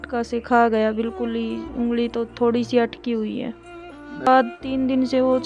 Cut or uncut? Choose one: cut